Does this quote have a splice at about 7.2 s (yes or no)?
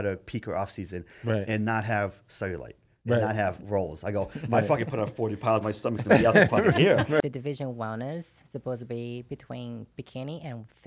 yes